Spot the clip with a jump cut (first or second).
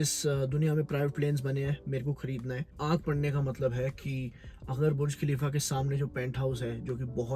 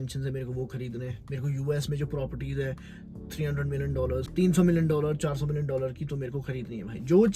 first